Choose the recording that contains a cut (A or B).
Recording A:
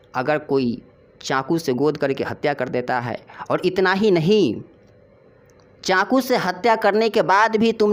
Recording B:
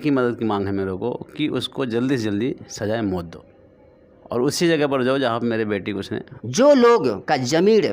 B